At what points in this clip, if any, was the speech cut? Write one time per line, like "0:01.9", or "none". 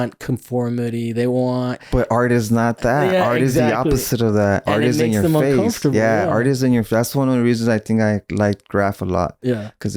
0:01.8

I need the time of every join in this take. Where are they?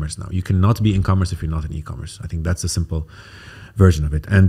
none

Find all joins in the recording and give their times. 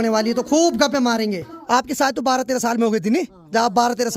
0:01.5

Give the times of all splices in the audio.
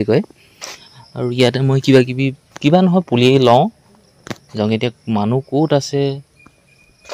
none

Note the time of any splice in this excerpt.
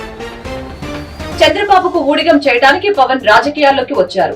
0:01.3

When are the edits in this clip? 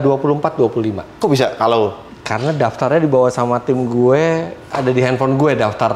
0:01.1

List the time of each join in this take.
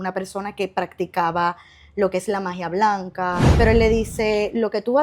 0:03.4

